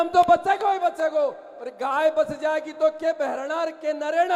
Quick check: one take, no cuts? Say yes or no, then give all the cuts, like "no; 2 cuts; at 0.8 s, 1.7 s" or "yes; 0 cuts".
yes; 0 cuts